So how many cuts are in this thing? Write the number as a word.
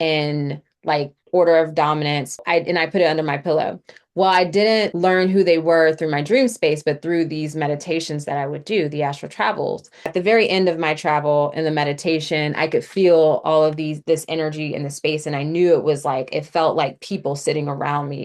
three